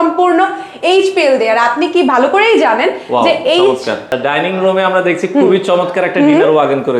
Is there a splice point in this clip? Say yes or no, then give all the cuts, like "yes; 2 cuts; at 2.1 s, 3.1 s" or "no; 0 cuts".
yes; 1 cut; at 4.1 s